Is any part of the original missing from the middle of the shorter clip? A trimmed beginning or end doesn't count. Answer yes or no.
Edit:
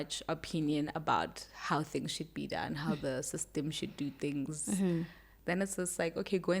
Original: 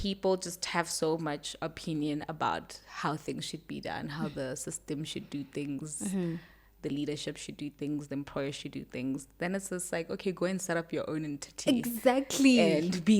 yes